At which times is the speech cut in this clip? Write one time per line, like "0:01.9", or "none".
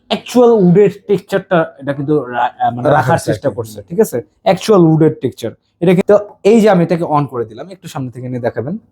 0:06.0